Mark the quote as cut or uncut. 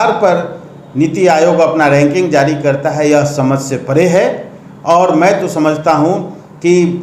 uncut